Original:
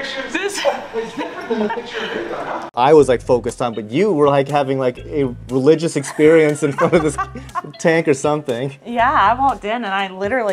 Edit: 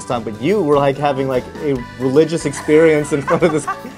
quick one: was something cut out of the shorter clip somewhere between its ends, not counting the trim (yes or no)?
no